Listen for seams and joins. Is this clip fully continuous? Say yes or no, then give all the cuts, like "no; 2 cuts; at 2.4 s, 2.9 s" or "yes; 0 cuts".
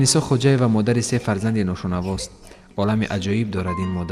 yes; 0 cuts